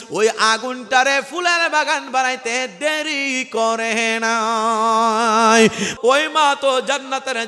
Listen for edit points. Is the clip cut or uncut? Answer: cut